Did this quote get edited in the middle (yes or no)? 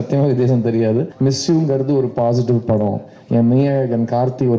yes